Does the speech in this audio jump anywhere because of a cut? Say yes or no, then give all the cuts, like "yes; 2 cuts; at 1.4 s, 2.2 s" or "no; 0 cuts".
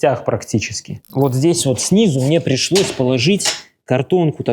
yes; 1 cut; at 1.1 s